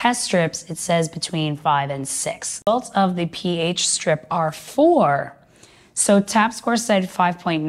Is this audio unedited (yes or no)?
no